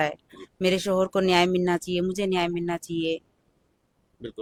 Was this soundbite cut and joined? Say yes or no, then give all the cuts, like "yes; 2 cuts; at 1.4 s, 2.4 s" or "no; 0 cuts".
no; 0 cuts